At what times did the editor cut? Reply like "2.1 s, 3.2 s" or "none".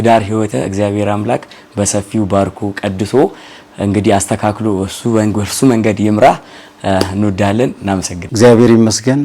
none